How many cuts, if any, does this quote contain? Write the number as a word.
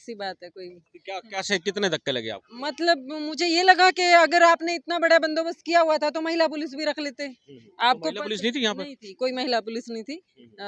zero